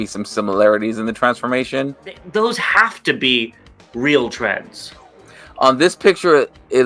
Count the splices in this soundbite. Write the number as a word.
one